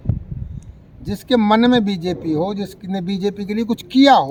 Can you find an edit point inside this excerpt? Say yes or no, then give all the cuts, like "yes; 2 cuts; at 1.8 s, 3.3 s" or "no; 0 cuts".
no; 0 cuts